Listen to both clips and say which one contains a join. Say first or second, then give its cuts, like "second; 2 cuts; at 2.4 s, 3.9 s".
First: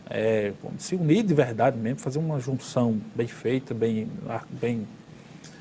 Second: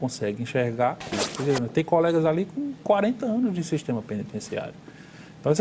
second; 1 cut; at 1.2 s